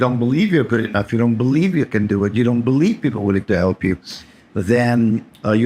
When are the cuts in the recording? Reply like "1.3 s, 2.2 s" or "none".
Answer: none

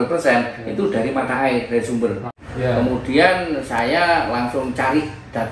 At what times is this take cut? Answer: 2.4 s

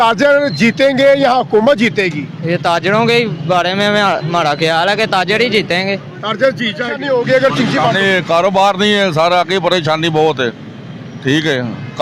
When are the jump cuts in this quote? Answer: 7.0 s

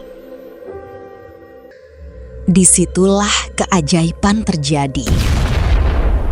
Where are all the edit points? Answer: 1.7 s

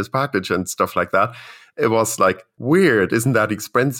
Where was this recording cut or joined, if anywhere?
2.5 s

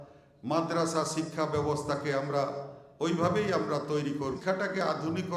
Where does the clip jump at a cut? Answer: 4.2 s

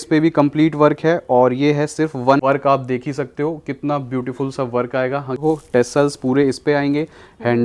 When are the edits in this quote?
2.4 s, 5.4 s

